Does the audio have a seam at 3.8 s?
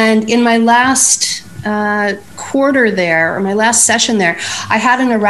no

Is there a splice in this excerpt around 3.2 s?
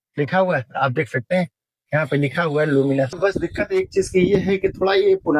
yes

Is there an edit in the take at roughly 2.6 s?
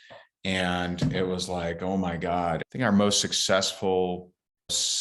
yes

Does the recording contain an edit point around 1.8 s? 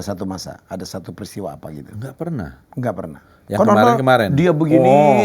no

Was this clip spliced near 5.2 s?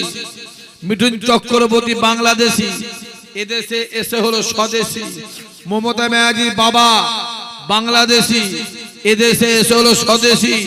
no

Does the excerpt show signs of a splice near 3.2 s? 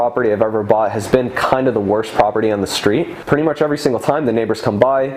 yes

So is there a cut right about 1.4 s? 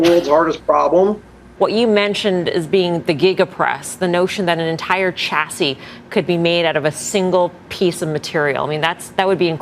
yes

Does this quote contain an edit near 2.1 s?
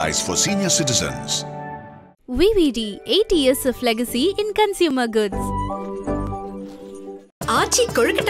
no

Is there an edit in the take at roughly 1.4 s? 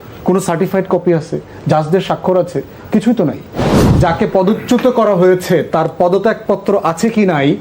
no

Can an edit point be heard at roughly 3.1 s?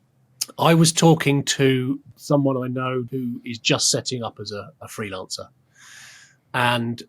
yes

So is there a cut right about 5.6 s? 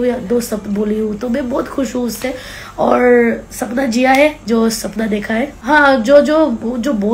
yes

